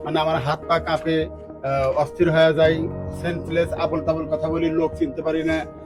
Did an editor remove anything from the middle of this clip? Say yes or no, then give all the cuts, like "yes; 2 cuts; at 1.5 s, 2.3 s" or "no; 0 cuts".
no; 0 cuts